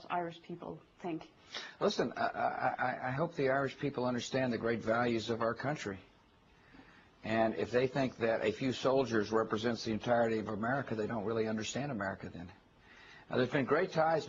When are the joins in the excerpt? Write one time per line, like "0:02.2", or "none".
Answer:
0:11.6